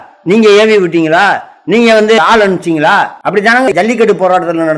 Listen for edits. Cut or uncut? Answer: cut